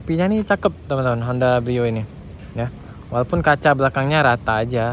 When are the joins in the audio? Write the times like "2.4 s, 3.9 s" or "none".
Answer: none